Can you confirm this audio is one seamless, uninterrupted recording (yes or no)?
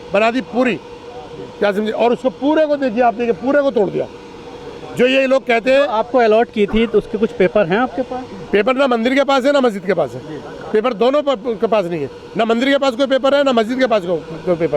yes